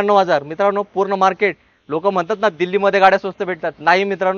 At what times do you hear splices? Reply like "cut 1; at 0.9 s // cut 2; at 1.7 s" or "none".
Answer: none